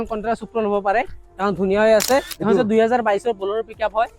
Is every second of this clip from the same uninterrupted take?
no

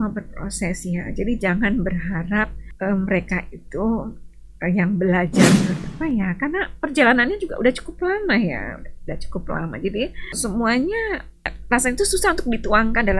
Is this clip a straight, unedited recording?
no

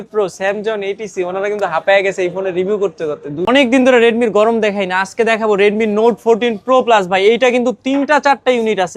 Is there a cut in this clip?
yes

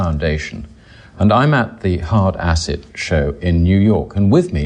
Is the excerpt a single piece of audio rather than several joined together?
yes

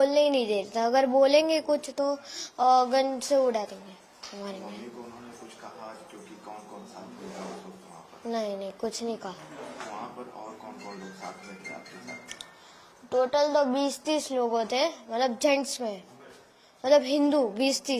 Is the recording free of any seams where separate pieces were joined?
yes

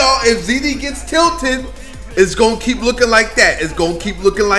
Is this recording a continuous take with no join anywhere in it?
yes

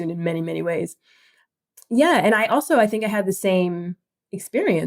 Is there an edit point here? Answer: no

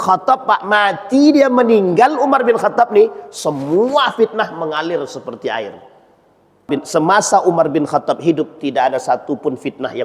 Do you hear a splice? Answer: yes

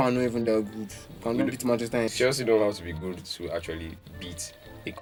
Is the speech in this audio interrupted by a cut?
no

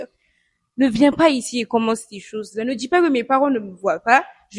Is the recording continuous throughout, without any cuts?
yes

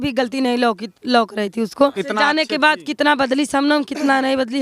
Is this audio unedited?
no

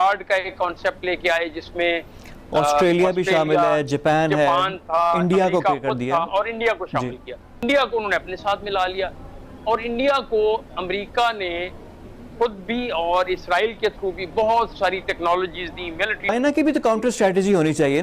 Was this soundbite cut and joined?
yes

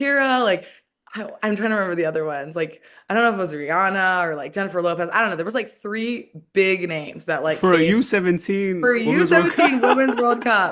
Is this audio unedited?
yes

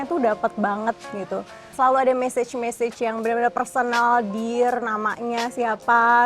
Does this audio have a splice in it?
yes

